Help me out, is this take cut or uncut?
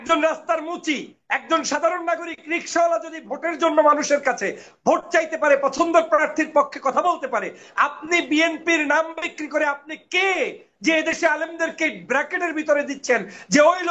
uncut